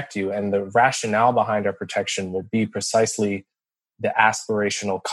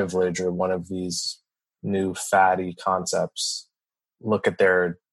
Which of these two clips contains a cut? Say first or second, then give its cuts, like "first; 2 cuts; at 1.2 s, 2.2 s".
second; 1 cut; at 3.9 s